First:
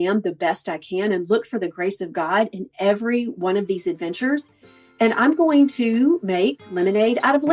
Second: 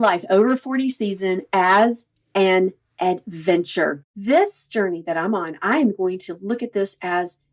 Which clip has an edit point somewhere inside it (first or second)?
second